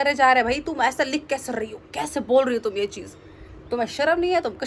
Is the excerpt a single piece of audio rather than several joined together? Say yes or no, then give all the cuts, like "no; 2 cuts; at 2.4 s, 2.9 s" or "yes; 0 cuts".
yes; 0 cuts